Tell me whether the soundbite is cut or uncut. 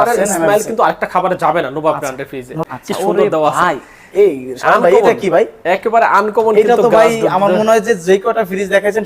cut